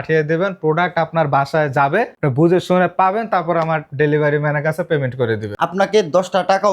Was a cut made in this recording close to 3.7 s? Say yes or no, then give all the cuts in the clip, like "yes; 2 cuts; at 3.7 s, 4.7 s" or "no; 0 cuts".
no; 2 cuts; at 2.1 s, 5.4 s